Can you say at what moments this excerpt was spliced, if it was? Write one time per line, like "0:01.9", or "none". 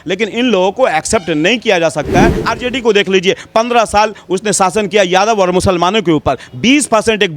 0:02.4